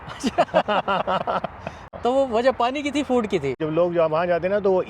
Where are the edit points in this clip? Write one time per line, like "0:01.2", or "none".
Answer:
0:01.9
0:03.6

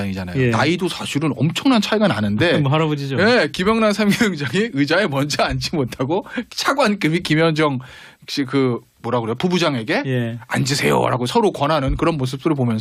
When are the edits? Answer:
none

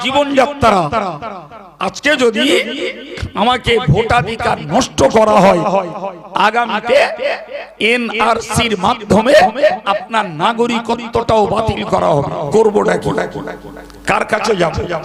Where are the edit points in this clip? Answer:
0:12.5

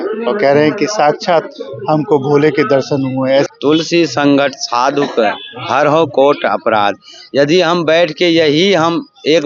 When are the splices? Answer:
0:03.5

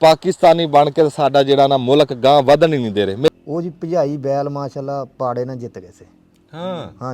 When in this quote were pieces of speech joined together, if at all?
0:03.3

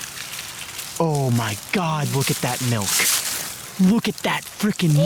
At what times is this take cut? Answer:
none

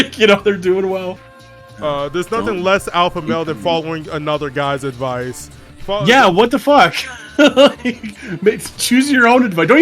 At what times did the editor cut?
0:01.2

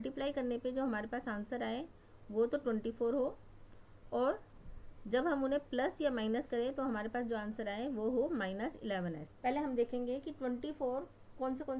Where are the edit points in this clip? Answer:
0:09.3

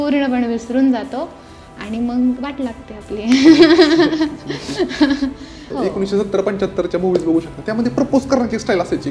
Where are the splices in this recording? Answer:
0:05.7

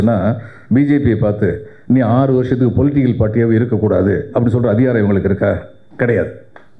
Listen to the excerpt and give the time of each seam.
none

